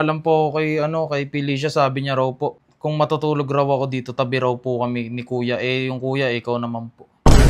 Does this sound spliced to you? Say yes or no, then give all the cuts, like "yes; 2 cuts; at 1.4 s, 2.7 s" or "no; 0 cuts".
yes; 1 cut; at 2.7 s